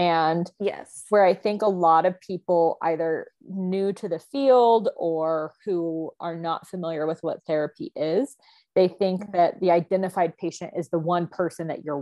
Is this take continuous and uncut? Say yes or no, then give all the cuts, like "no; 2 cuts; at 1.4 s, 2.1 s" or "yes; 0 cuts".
yes; 0 cuts